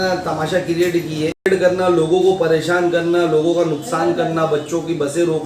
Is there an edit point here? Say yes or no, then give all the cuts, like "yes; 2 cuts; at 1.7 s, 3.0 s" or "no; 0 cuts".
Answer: yes; 1 cut; at 1.5 s